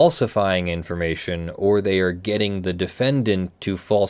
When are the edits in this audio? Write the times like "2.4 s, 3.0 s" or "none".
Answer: none